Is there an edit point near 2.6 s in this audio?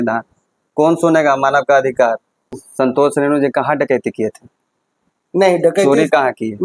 yes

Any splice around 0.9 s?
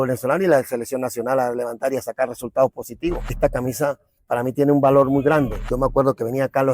no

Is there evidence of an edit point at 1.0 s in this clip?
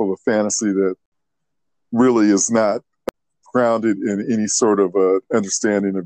yes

